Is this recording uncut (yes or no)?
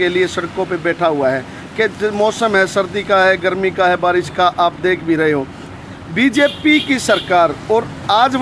yes